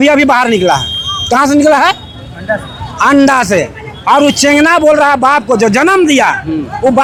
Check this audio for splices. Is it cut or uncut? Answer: uncut